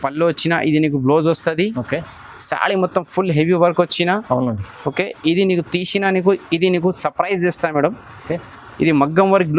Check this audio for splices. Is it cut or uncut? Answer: uncut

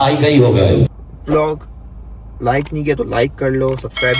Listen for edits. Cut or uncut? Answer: cut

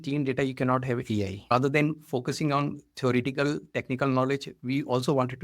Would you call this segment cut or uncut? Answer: cut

